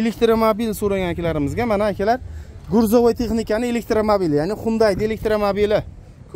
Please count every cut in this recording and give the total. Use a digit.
0